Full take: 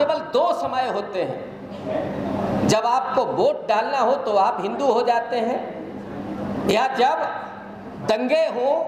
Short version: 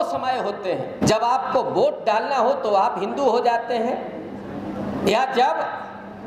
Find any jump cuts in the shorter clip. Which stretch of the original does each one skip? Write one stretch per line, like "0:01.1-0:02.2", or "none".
0:01.5-0:02.6